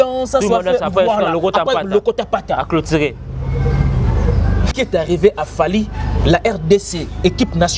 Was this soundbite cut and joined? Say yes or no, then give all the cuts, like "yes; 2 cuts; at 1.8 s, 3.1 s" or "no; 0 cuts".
yes; 1 cut; at 4.7 s